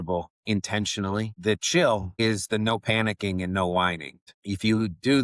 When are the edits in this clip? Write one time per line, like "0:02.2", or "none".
0:04.3